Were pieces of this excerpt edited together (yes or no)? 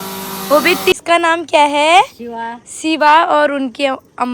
yes